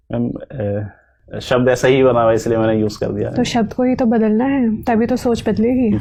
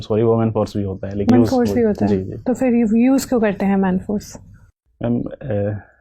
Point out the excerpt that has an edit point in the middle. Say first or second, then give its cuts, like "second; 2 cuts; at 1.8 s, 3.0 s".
second; 1 cut; at 1.3 s